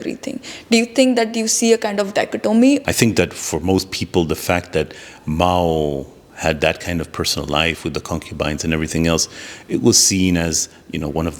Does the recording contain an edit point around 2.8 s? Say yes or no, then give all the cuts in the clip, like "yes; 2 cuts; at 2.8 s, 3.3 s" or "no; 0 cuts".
yes; 1 cut; at 2.8 s